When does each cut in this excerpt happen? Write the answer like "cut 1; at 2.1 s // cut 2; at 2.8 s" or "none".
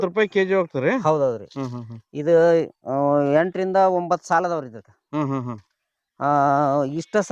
none